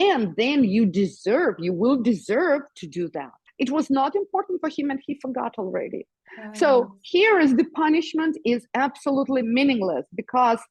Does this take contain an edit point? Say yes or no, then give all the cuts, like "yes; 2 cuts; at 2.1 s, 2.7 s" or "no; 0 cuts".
yes; 1 cut; at 3.5 s